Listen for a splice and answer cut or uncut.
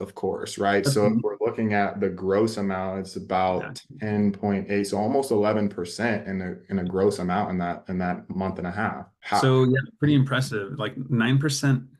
uncut